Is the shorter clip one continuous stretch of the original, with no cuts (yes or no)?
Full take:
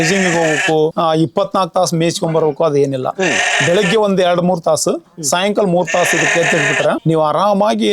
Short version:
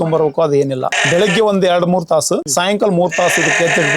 no